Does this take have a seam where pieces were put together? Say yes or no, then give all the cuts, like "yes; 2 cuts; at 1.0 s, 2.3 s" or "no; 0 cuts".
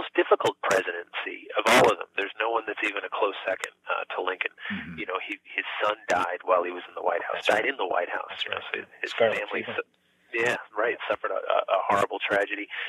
no; 0 cuts